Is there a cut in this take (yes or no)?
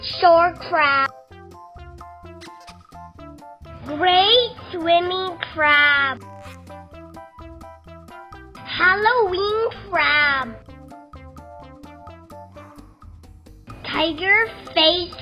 yes